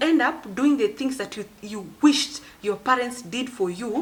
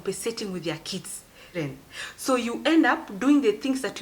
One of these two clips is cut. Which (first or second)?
second